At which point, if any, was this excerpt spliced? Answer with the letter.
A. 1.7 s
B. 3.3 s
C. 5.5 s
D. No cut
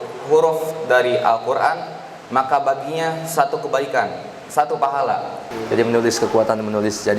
C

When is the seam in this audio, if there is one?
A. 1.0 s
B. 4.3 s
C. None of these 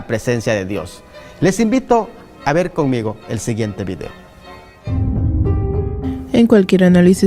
A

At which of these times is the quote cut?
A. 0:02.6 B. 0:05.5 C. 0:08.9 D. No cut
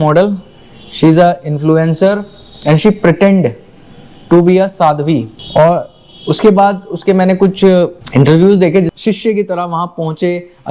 C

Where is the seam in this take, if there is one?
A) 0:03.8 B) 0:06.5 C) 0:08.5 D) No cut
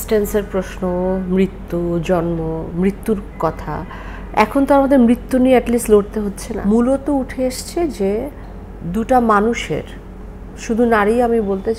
B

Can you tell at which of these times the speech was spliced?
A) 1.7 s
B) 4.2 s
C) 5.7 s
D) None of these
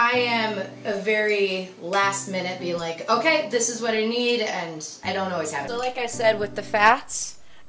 C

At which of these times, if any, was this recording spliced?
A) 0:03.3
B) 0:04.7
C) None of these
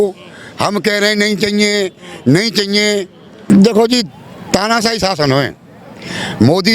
A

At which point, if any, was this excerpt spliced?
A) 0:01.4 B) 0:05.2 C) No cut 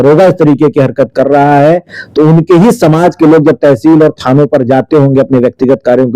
C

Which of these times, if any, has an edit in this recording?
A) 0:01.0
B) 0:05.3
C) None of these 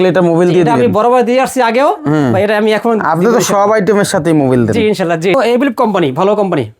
B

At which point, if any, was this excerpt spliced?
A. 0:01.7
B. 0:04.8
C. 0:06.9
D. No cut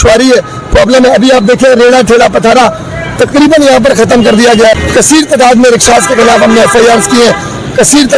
B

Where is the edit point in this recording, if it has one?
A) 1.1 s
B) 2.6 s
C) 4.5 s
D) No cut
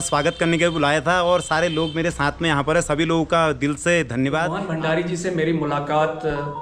C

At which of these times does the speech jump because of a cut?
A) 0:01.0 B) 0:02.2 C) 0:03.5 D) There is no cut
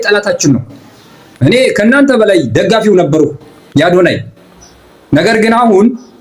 D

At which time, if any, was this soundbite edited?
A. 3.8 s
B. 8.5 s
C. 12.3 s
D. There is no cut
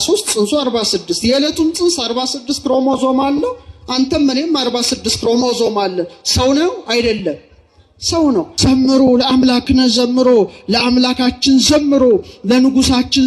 B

